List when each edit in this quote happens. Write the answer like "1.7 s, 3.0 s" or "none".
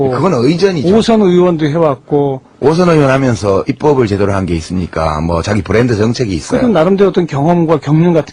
6.0 s